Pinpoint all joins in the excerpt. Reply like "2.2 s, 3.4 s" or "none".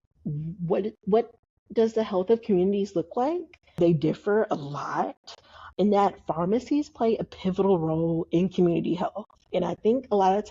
3.8 s, 5.7 s

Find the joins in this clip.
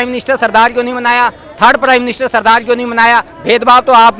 none

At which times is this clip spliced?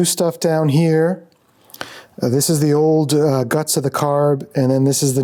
none

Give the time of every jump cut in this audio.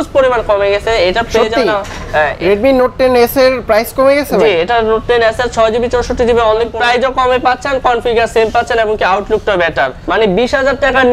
2.4 s, 6.7 s, 10.0 s

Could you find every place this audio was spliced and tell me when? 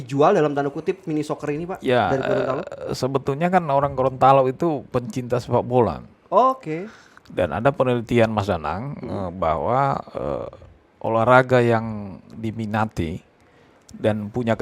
none

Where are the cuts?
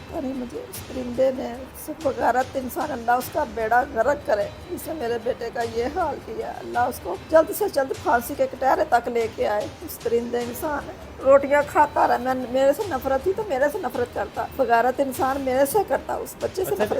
none

